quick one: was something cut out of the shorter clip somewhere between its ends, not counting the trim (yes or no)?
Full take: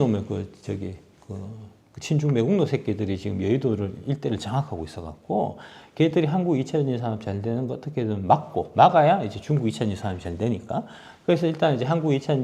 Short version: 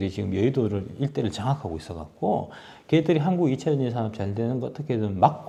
no